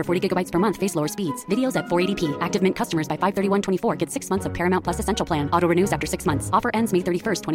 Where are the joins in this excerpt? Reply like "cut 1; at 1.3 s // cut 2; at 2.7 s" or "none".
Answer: none